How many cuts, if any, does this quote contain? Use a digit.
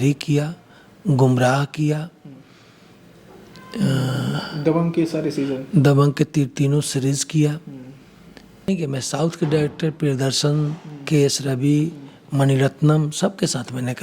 1